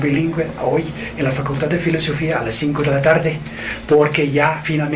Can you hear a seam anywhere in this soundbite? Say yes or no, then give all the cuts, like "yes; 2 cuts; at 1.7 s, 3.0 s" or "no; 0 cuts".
yes; 1 cut; at 3.3 s